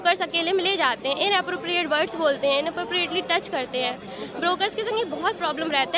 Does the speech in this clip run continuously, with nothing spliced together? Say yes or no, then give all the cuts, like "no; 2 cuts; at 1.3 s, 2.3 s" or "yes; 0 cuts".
yes; 0 cuts